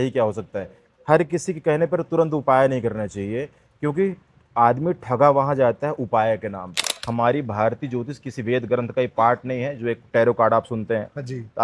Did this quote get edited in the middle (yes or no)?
yes